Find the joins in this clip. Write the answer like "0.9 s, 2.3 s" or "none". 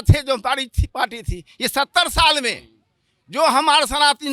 none

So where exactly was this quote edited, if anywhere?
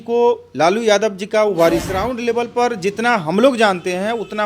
2.1 s

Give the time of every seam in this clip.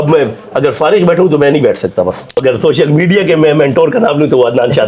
2.4 s

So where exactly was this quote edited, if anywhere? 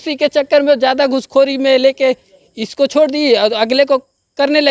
none

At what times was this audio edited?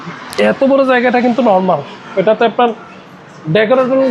none

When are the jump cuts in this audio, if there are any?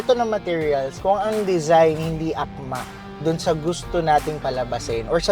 0.9 s

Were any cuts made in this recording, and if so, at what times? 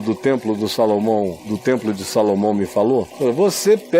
1.5 s, 3.1 s

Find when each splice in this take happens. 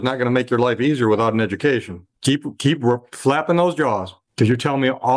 2.1 s

